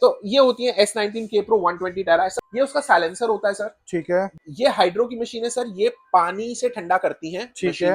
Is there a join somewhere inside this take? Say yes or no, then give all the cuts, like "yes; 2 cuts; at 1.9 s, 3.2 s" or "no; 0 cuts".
yes; 2 cuts; at 2.4 s, 4.4 s